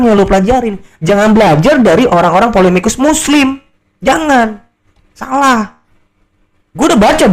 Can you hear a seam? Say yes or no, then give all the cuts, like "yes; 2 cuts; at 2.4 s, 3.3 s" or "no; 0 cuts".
no; 0 cuts